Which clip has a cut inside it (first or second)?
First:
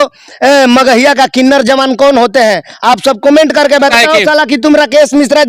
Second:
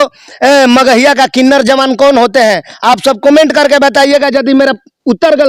first